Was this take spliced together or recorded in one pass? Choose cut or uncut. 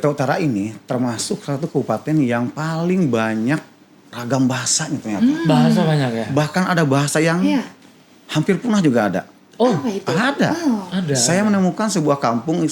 uncut